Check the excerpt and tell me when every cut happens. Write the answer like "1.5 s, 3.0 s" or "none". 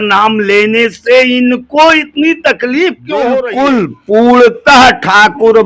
3.5 s